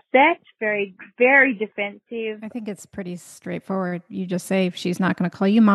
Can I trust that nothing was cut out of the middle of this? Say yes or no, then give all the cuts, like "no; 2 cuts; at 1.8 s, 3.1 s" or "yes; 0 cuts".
no; 1 cut; at 2.4 s